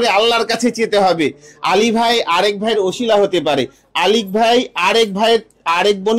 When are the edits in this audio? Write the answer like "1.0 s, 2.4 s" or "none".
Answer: none